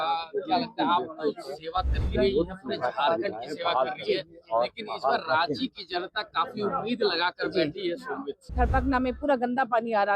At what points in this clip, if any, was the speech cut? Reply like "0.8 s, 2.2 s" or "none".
8.4 s